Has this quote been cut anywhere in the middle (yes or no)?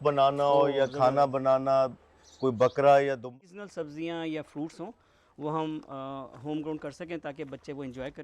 yes